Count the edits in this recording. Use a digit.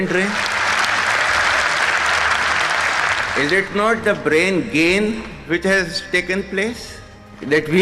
0